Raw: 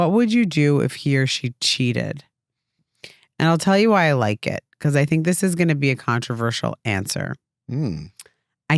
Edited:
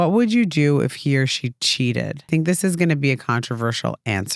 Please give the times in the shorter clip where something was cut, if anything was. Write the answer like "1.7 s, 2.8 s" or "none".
2.3 s